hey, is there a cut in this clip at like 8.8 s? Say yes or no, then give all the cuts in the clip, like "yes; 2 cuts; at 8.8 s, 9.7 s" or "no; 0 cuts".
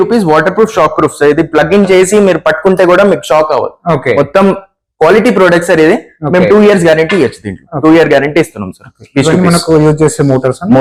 no; 0 cuts